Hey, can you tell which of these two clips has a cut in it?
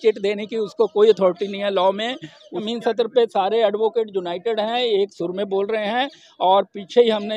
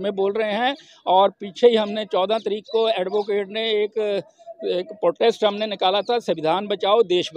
first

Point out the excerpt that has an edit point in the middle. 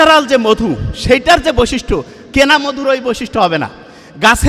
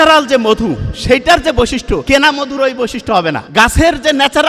second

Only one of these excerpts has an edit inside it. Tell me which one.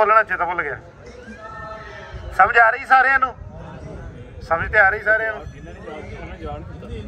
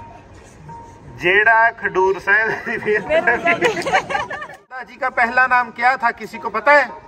second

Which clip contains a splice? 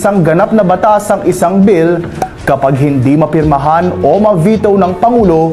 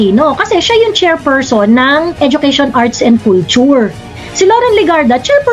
second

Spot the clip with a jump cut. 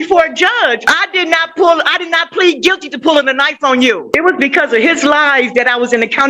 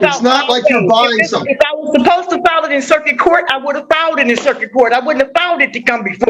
first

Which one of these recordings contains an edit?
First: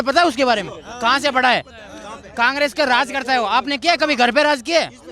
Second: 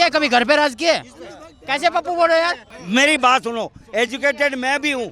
second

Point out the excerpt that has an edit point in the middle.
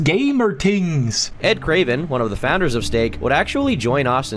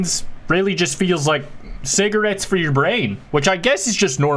first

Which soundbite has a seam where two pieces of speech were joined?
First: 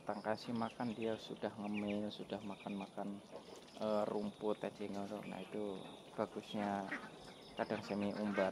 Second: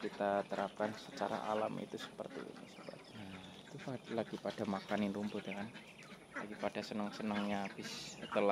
second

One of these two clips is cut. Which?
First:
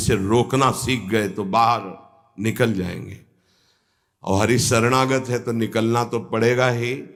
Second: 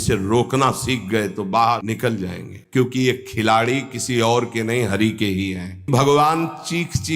second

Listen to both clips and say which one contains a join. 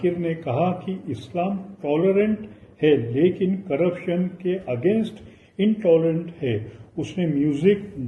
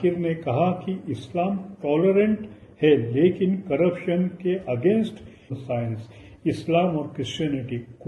second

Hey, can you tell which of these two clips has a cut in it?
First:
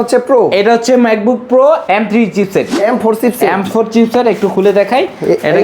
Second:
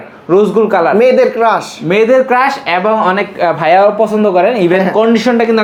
first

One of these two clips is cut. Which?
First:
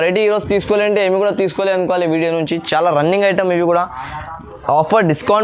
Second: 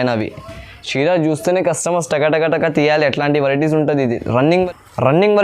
second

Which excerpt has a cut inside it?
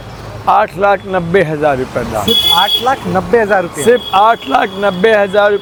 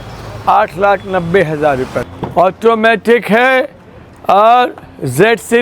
second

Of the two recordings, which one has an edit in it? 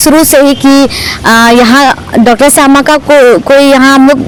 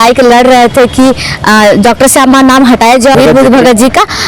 second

